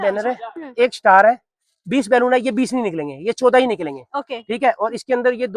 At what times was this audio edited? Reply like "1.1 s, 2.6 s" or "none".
none